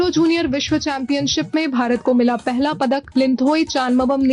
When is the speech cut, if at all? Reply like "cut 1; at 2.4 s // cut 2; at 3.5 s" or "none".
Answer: cut 1; at 3.1 s